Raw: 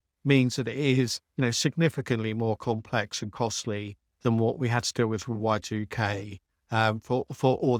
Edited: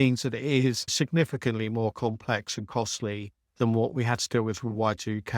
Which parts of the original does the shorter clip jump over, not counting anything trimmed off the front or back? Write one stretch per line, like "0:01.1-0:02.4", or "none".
0:01.3-0:01.6